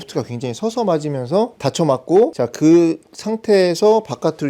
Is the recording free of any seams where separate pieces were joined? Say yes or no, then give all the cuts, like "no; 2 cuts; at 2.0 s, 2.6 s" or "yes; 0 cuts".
no; 2 cuts; at 1.6 s, 2.3 s